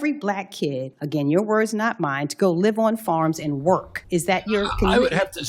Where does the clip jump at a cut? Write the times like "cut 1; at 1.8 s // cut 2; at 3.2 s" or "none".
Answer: cut 1; at 0.9 s // cut 2; at 3.9 s